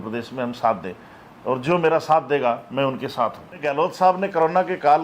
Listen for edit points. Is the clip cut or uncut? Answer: cut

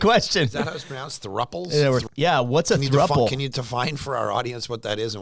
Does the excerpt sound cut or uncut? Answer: cut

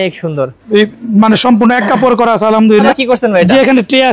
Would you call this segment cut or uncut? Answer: cut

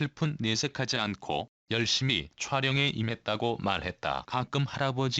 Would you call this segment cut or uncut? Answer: cut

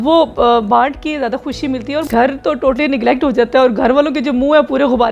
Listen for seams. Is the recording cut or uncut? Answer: cut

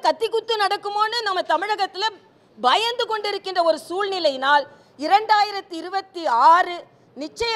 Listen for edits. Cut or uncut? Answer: uncut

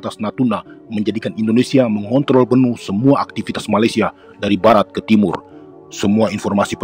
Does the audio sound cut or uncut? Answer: uncut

